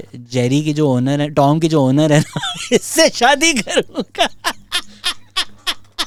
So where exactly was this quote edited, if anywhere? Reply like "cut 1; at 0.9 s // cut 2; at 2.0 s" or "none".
none